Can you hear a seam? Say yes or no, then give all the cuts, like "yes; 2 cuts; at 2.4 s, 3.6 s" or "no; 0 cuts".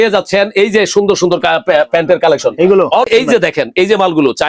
yes; 1 cut; at 3.1 s